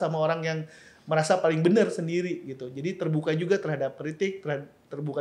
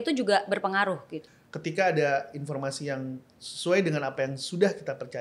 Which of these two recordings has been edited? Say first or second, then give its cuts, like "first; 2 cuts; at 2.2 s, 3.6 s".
second; 1 cut; at 1.2 s